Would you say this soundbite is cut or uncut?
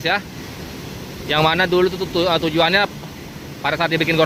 uncut